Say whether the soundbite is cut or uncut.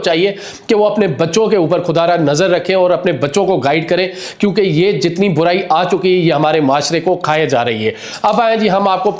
uncut